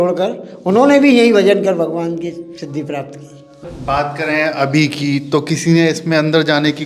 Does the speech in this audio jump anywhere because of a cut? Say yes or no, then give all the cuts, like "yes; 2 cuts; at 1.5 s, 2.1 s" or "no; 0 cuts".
yes; 1 cut; at 3.7 s